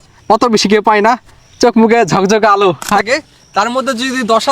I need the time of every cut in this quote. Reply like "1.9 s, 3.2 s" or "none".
3.0 s